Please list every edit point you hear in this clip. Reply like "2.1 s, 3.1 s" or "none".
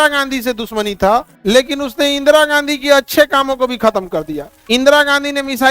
1.3 s, 4.5 s